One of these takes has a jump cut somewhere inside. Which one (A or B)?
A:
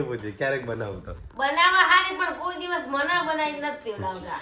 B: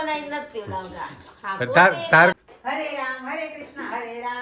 B